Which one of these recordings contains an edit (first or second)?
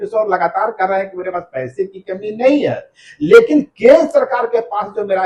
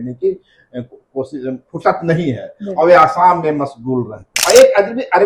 second